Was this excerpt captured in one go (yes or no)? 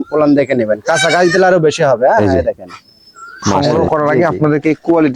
no